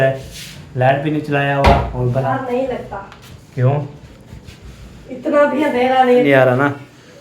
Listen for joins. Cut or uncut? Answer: cut